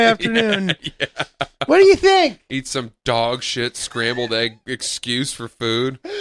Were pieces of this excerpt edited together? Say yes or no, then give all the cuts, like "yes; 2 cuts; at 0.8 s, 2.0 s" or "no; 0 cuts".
no; 0 cuts